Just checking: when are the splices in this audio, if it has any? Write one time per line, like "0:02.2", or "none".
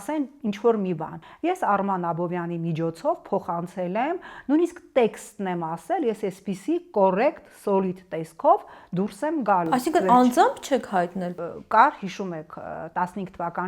0:01.2
0:11.3